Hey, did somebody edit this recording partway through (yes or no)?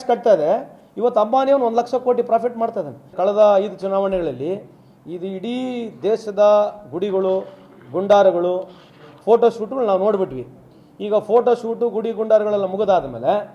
yes